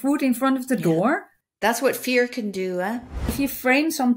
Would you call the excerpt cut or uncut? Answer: cut